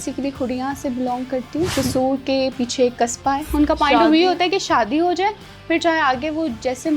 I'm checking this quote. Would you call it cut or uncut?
cut